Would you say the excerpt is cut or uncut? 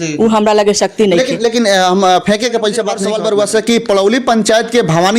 cut